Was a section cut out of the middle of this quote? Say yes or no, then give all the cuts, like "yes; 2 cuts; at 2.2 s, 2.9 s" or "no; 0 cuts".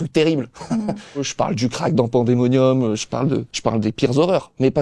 yes; 2 cuts; at 1.3 s, 3.5 s